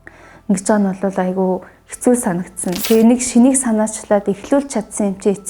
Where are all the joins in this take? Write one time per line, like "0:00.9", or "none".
0:02.8